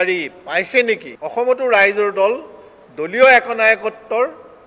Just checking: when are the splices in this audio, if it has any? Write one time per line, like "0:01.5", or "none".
0:01.1